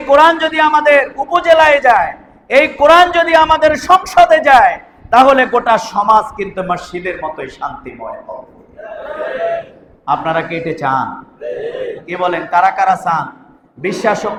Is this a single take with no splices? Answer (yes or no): yes